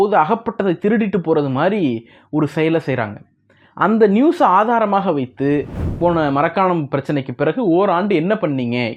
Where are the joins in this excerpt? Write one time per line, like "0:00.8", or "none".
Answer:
0:05.9